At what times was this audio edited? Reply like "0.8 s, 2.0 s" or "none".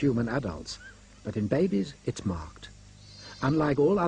1.7 s